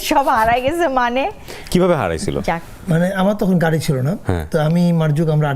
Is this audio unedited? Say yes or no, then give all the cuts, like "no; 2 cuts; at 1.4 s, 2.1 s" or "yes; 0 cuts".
yes; 0 cuts